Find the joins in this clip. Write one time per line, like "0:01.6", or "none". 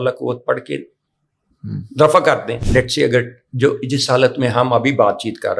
0:02.6